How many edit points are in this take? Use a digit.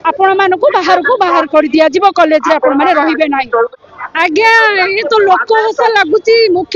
1